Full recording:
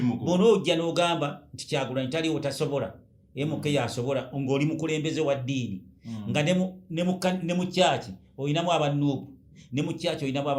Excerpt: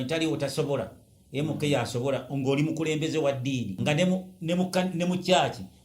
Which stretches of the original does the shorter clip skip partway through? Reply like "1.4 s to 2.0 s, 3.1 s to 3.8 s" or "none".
5.8 s to 6.2 s